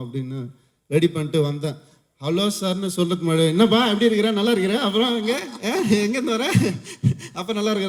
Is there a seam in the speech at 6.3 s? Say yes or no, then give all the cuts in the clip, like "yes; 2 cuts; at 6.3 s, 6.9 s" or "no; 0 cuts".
no; 0 cuts